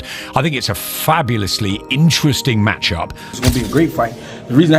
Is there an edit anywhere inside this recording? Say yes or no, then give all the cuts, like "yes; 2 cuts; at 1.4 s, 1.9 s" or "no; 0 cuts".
yes; 1 cut; at 3.4 s